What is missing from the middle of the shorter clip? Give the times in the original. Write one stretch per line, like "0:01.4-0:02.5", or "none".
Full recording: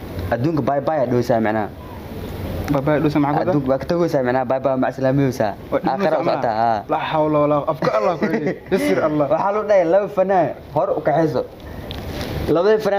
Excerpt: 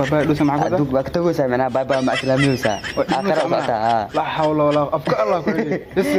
none